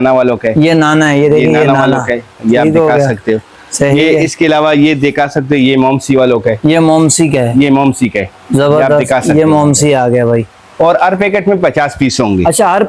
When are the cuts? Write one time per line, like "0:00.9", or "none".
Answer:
none

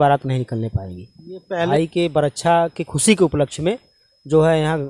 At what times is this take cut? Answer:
0:01.7

